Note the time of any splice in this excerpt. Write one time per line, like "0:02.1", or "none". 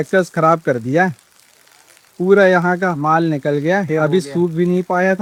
none

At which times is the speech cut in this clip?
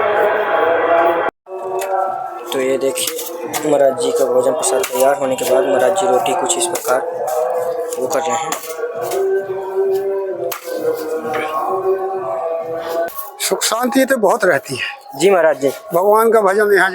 0:01.3
0:13.1

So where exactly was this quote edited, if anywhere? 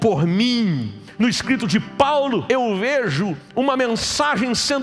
0:01.1
0:02.4

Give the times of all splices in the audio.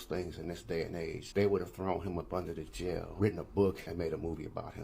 0:01.2
0:03.1
0:03.8

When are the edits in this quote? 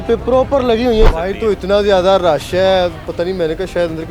0:01.1

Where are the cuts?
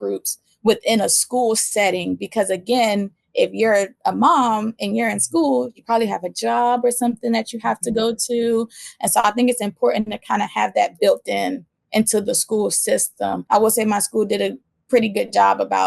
0:13.4

